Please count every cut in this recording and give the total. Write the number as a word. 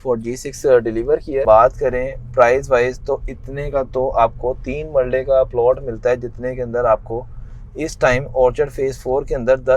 one